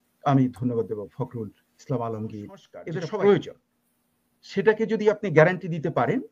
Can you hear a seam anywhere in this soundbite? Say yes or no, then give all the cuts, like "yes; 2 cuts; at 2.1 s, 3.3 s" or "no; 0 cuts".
yes; 1 cut; at 2.7 s